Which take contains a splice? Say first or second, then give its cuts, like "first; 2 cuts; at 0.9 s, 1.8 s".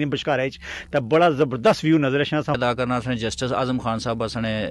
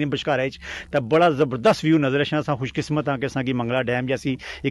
first; 1 cut; at 2.6 s